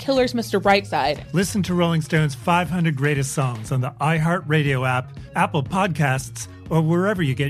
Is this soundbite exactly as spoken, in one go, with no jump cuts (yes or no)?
no